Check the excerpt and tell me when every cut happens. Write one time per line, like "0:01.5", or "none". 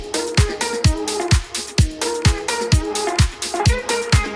none